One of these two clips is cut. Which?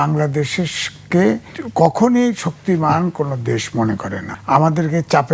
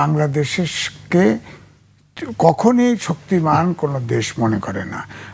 first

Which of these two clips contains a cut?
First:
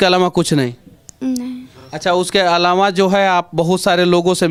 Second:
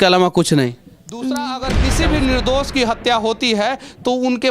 second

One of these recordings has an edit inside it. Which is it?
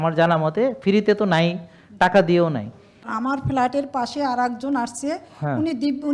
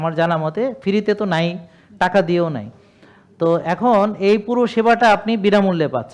first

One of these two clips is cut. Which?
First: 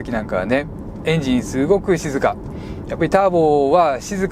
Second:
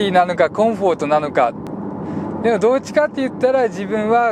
second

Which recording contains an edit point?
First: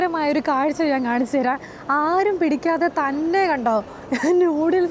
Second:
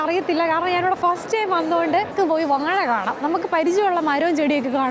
second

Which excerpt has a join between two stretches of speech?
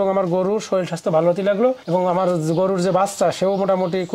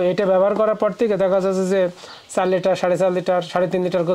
first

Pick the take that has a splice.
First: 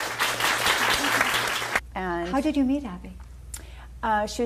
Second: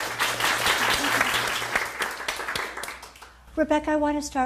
second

